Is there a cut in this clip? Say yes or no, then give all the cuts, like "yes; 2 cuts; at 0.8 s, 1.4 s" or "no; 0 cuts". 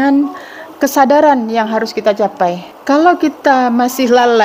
yes; 1 cut; at 2.7 s